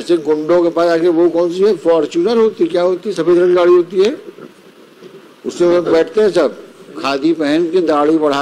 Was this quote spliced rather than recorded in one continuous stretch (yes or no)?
no